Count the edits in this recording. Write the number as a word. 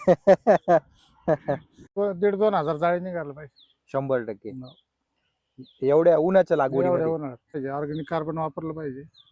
two